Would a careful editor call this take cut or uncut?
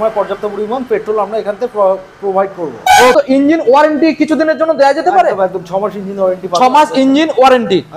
cut